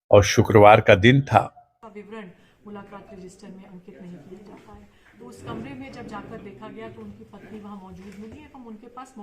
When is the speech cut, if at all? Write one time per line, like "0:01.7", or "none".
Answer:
0:01.7